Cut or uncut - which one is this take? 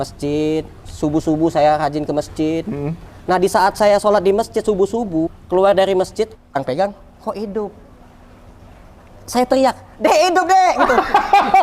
cut